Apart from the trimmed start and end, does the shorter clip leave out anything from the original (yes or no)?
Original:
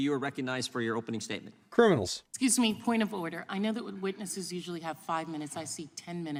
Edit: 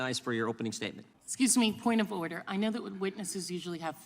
yes